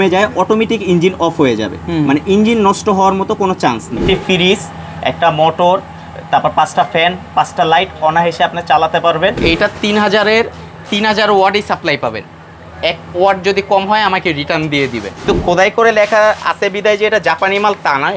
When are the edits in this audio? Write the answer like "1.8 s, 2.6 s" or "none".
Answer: 4.0 s, 9.4 s, 15.3 s